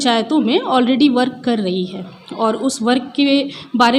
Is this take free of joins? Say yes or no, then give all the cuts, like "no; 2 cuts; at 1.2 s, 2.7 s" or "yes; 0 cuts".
yes; 0 cuts